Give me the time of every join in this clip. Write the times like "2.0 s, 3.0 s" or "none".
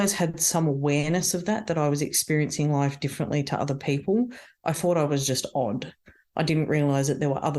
none